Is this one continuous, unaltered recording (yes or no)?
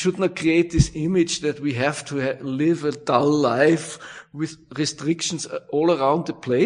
yes